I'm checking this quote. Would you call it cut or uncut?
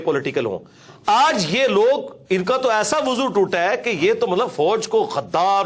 uncut